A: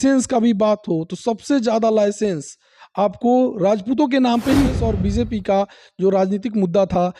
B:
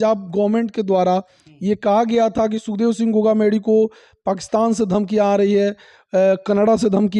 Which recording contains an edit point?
A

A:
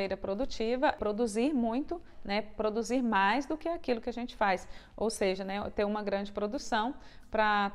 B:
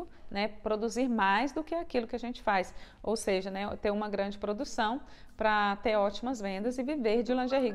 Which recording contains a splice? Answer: A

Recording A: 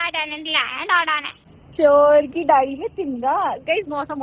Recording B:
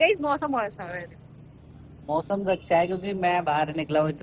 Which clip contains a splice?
A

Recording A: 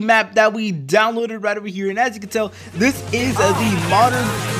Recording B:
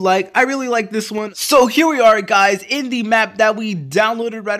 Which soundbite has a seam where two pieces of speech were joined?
B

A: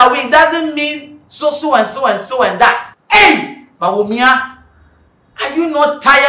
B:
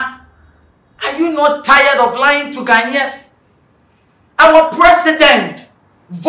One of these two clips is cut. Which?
A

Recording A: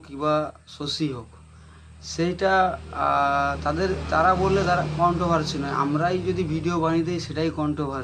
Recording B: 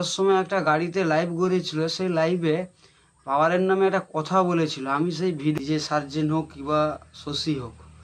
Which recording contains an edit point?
B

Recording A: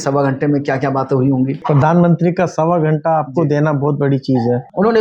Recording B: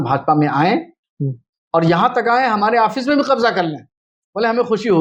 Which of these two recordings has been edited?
A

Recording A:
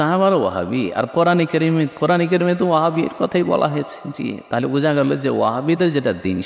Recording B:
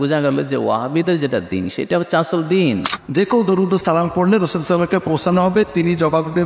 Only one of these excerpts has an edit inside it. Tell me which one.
B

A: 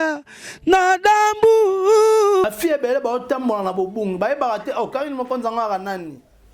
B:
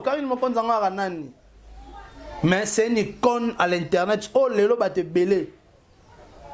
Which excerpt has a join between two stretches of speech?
A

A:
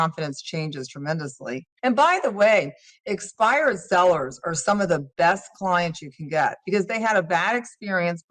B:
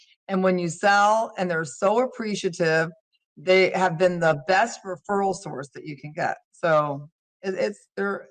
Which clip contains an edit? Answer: A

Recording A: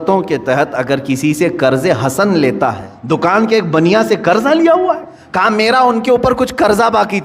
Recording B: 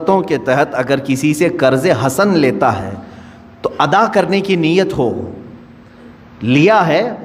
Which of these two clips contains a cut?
A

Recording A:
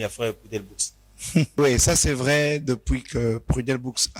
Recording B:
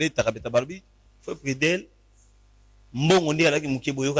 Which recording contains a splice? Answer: A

